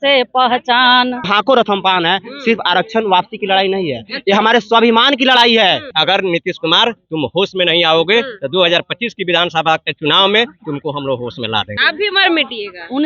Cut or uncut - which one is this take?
cut